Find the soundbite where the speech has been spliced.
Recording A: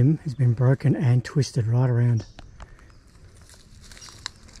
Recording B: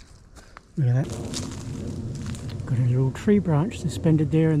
B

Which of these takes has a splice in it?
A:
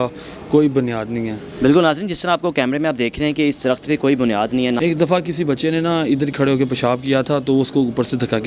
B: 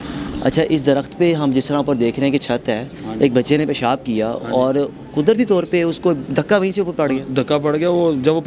A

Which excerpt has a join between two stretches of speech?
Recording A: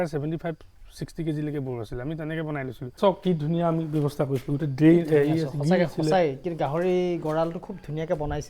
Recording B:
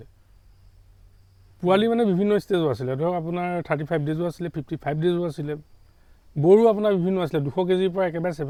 A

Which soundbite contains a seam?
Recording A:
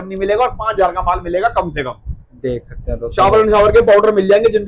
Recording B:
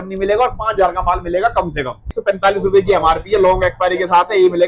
B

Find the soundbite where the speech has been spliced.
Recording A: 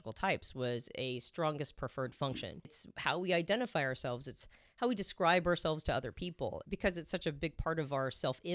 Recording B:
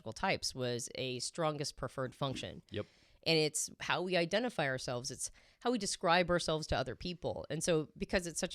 A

